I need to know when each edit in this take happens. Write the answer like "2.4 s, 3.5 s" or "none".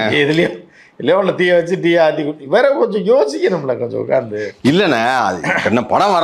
none